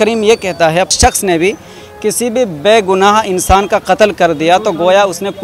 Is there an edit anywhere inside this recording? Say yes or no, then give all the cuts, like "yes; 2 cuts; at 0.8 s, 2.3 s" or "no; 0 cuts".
yes; 1 cut; at 0.9 s